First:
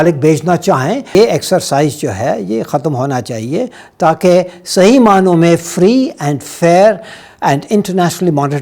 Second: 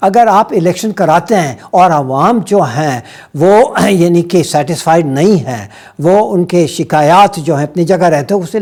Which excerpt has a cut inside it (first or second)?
first